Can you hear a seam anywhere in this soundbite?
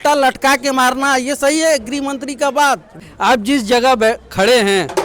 yes; 1 cut; at 3.0 s

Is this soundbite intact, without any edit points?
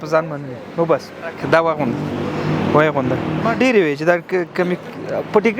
no; 2 cuts; at 1.4 s, 3.5 s

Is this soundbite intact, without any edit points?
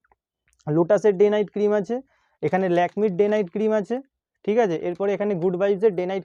yes; 0 cuts

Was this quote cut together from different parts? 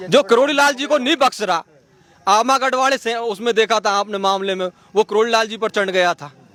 no; 0 cuts

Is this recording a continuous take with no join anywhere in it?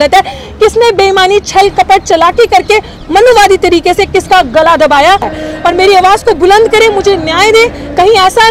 no; 1 cut; at 5.3 s

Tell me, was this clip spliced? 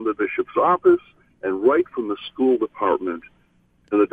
no; 0 cuts

